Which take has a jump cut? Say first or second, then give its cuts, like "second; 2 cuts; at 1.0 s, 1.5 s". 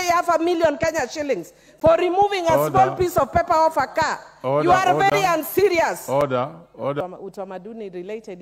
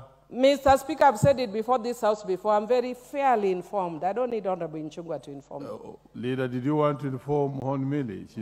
first; 1 cut; at 7.0 s